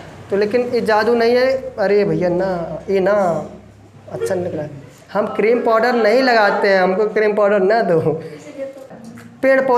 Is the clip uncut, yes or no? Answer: no